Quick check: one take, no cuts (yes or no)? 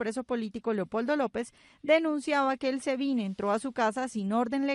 no